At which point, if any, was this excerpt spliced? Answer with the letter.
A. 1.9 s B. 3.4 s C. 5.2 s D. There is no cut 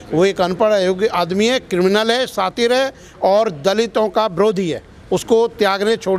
D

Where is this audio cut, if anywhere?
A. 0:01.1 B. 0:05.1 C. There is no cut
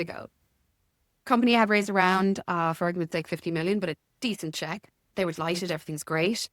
B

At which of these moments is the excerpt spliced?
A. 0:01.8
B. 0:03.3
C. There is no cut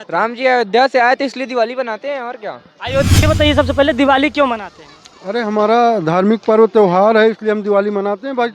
B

